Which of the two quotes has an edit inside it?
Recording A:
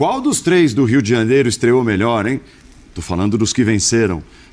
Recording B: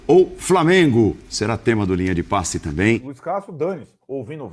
B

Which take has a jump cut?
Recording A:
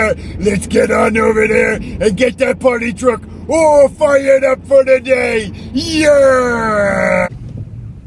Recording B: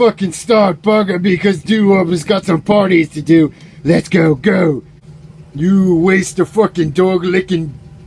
B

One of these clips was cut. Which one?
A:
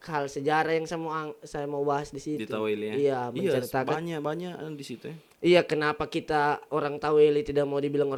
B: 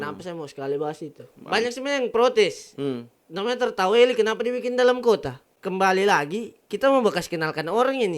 B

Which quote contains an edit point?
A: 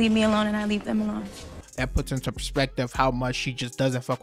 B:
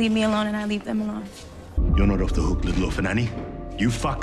B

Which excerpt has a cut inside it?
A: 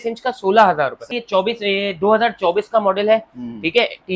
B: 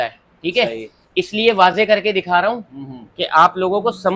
A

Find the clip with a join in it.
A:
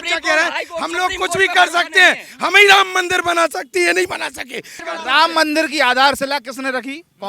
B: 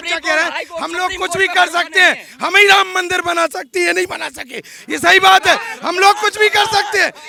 A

